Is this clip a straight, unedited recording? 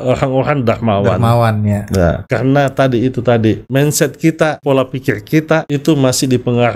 no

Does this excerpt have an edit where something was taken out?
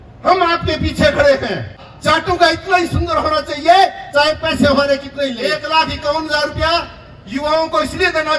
yes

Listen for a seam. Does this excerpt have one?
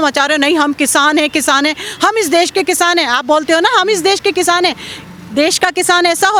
no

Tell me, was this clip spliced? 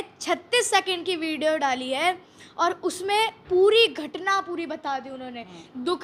no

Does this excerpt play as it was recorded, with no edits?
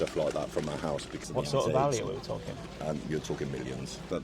no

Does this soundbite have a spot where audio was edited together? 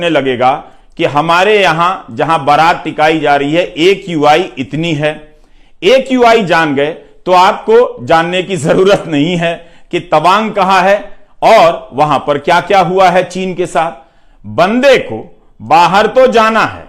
no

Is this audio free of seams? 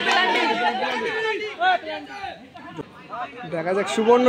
no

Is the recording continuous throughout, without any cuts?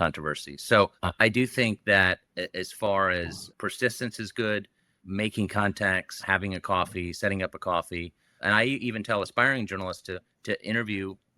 no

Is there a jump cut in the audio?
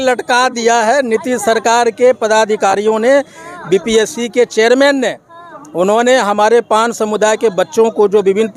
no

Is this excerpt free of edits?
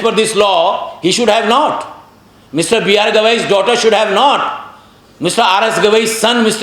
yes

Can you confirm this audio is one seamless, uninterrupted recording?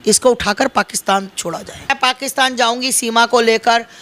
no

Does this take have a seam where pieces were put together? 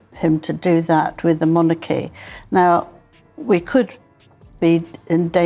no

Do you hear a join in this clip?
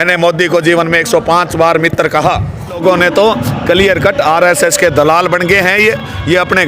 yes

